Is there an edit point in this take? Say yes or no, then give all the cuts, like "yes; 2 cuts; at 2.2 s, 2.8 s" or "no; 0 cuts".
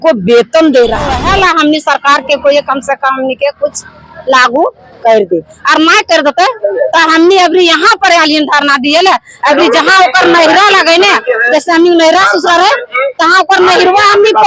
yes; 1 cut; at 1.2 s